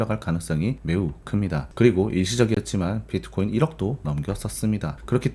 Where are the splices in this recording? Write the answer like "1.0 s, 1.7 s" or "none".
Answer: 1.7 s